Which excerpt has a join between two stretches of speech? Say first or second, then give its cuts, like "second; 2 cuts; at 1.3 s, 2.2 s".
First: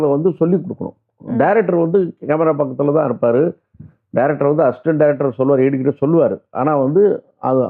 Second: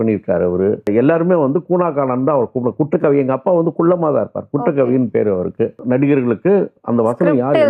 second; 2 cuts; at 0.9 s, 5.8 s